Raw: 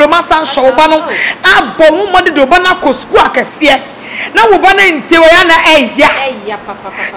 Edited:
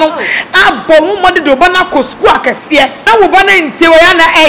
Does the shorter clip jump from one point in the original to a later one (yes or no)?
yes